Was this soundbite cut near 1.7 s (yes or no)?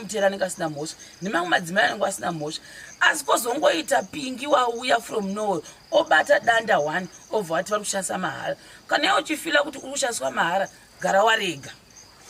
no